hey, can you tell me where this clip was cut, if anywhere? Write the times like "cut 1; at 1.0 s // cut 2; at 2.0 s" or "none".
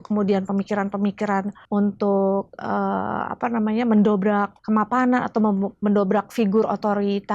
cut 1; at 1.6 s // cut 2; at 4.6 s